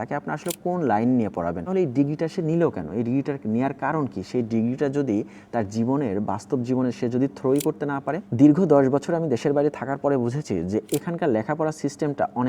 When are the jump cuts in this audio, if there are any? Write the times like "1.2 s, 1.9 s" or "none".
1.6 s, 8.2 s